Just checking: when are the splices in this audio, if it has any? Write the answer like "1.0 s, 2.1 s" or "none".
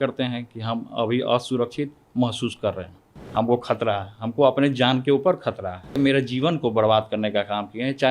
3.1 s, 6.0 s